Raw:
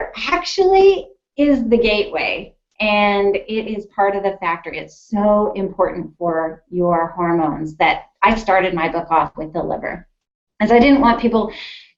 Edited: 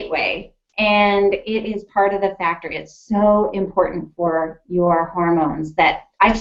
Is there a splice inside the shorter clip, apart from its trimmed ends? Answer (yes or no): no